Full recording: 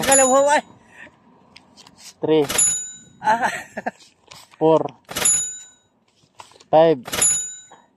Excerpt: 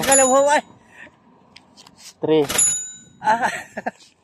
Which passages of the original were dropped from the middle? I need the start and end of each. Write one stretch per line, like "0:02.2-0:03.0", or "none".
none